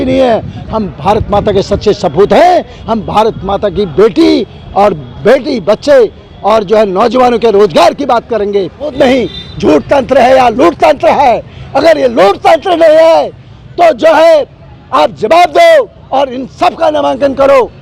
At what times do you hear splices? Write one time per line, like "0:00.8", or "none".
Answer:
0:08.9

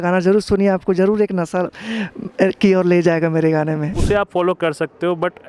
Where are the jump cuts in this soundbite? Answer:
0:04.0

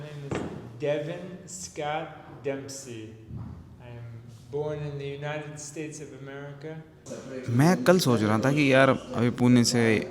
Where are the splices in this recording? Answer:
0:07.3

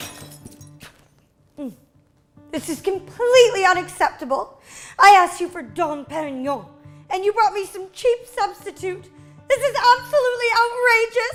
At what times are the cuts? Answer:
none

